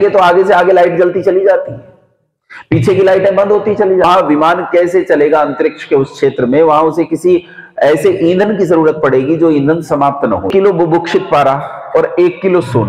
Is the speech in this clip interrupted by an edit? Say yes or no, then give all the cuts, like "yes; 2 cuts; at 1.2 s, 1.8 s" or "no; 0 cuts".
yes; 2 cuts; at 4.0 s, 10.5 s